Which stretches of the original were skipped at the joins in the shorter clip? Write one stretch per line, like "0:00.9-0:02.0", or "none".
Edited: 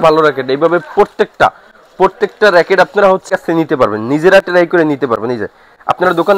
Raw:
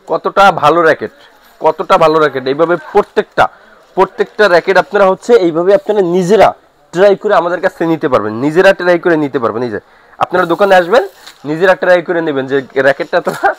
0:05.2-0:07.6